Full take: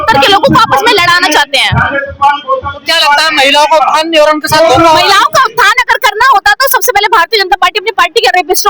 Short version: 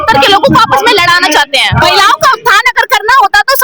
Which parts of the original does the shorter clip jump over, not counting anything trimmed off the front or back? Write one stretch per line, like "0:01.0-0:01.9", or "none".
0:01.8-0:04.9